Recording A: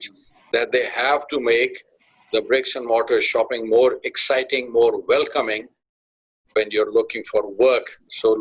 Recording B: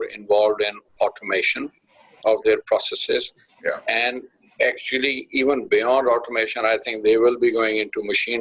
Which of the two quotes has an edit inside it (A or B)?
A